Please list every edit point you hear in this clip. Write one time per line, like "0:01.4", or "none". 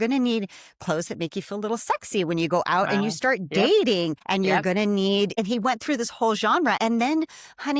0:04.2
0:05.4
0:06.8